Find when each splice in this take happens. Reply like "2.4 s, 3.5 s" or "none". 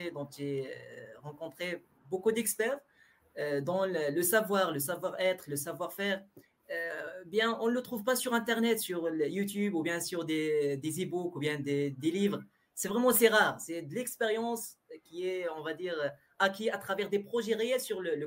none

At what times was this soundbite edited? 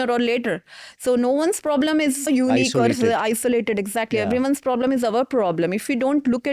2.2 s

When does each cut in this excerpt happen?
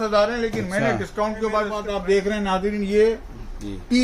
1.8 s

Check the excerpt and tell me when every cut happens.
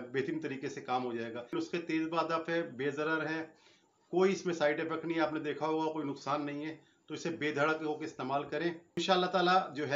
1.5 s, 9.0 s

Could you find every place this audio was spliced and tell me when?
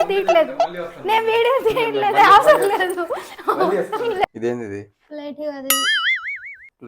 4.2 s

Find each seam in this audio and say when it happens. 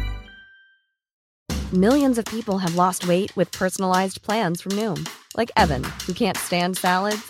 1.1 s

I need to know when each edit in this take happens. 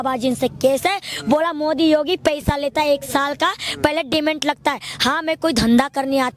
none

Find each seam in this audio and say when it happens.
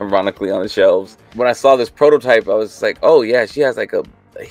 1.2 s

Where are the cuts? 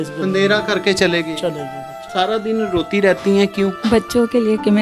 2.1 s, 3.8 s

